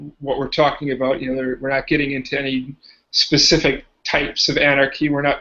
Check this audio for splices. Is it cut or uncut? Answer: cut